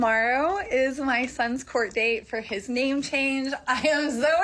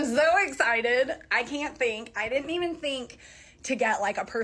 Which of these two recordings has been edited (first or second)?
second